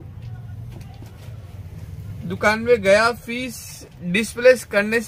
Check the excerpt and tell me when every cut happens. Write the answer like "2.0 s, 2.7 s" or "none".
none

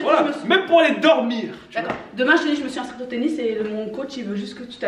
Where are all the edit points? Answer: none

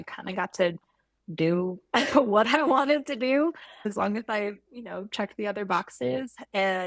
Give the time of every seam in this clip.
3.9 s

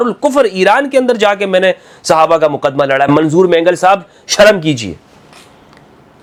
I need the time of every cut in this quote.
none

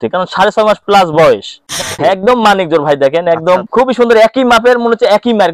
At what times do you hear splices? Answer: 1.9 s, 3.7 s

